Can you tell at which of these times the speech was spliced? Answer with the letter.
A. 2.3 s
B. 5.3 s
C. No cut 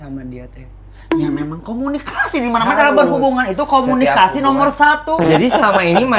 B